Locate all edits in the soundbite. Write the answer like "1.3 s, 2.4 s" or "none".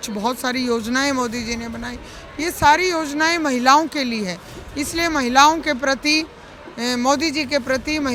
none